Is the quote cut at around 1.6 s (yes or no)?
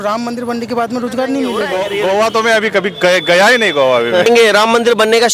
yes